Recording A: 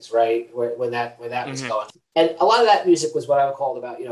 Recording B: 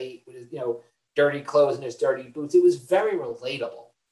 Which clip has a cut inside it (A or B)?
A